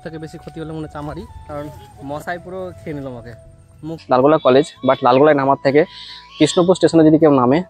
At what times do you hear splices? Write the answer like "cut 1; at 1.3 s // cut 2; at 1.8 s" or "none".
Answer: cut 1; at 1.4 s // cut 2; at 4.0 s